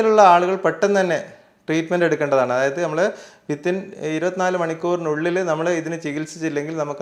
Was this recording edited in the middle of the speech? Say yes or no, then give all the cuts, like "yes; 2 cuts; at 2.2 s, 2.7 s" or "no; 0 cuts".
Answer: no; 0 cuts